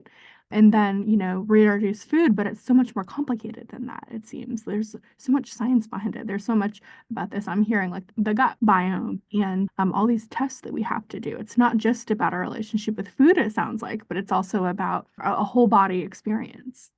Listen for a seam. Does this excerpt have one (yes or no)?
no